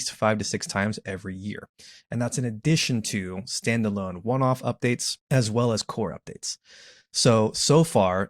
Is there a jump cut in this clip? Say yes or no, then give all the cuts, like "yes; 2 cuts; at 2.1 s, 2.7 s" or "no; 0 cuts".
yes; 1 cut; at 5.1 s